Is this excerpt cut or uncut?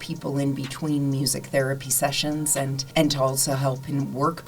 cut